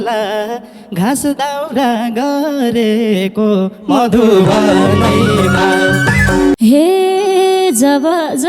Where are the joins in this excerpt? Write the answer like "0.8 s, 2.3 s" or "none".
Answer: 6.5 s